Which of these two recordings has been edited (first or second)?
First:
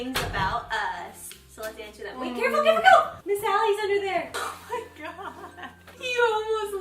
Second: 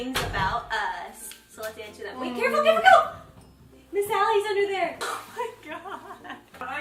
first